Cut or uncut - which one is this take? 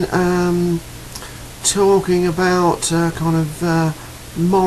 uncut